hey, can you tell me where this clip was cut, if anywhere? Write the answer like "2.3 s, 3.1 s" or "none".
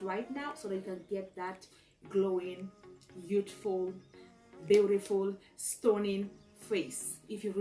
none